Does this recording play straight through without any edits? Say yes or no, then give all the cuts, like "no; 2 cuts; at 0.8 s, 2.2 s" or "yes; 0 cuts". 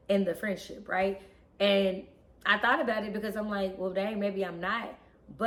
yes; 0 cuts